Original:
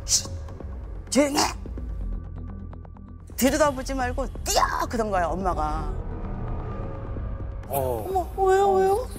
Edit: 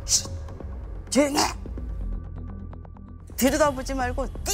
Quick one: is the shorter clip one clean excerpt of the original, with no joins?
yes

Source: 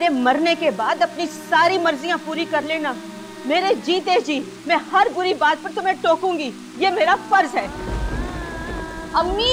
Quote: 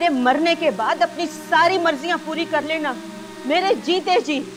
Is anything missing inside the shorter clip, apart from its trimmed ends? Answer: no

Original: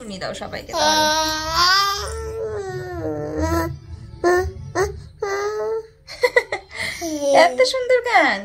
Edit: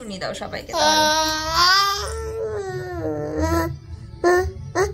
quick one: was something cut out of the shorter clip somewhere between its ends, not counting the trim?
no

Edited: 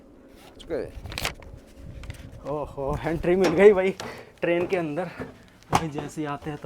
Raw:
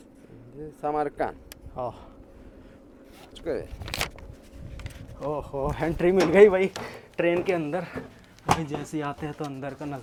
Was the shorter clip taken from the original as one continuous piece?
yes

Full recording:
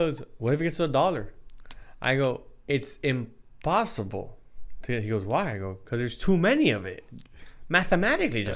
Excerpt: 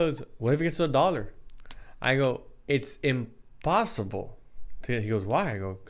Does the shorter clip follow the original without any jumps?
yes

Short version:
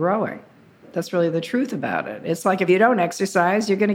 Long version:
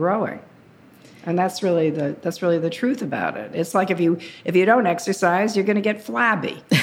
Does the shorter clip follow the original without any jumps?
no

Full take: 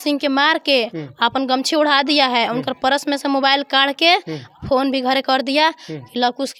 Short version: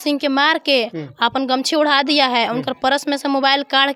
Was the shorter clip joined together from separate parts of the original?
no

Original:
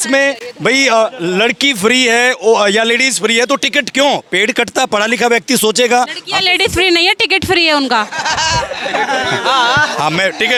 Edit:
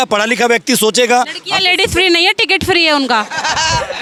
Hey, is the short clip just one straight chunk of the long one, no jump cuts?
yes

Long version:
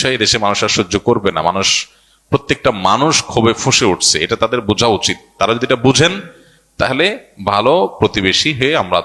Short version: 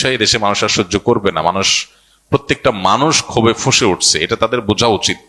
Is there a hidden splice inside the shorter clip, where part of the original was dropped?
no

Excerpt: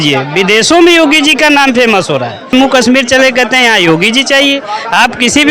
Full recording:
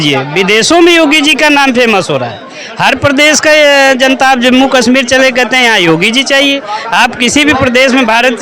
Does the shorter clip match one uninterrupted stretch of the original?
no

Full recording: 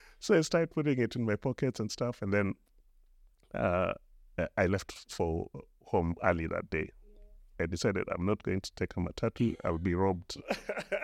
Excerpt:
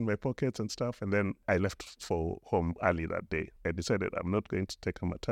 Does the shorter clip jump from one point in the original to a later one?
yes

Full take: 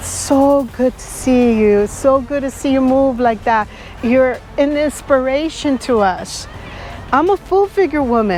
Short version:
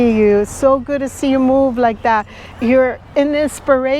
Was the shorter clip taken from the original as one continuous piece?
yes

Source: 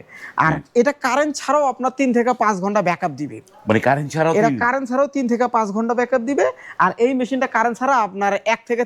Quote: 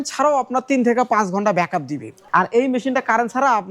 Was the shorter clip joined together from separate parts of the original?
yes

